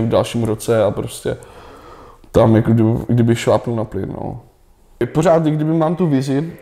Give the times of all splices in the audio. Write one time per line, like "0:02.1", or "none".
0:05.0